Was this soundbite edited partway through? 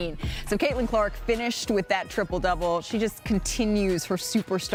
no; 0 cuts

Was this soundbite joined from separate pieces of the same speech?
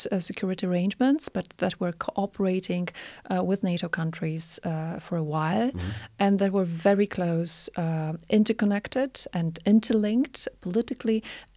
no; 0 cuts

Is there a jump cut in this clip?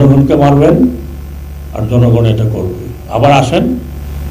no; 0 cuts

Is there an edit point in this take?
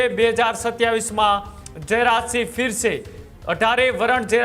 no; 0 cuts

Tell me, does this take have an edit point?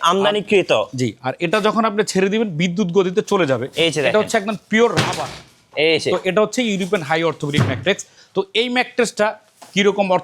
no; 0 cuts

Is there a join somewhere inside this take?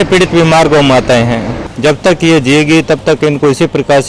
yes; 1 cut; at 1.5 s

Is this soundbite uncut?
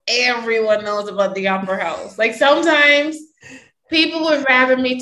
yes; 0 cuts

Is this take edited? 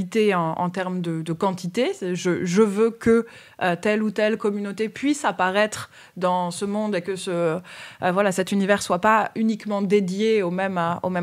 no; 0 cuts

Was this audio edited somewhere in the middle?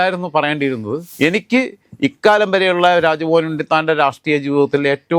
yes; 1 cut; at 1.0 s

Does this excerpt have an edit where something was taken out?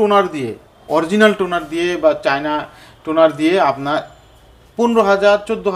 no; 0 cuts

